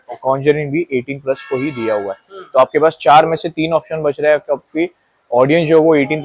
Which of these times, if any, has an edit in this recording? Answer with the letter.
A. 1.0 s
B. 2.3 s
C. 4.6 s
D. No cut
D